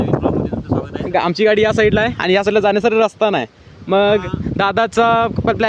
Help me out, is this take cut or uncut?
cut